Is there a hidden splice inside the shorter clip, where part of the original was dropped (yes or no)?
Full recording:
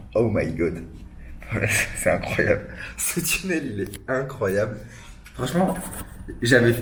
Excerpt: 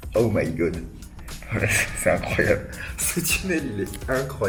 no